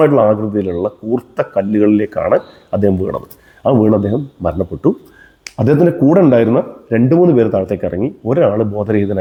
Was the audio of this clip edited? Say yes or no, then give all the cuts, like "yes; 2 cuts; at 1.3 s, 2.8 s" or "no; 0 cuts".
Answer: no; 0 cuts